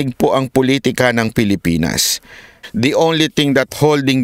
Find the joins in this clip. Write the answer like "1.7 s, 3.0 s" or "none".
2.5 s